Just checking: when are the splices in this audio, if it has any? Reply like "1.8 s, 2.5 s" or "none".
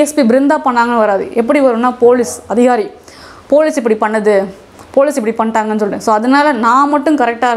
none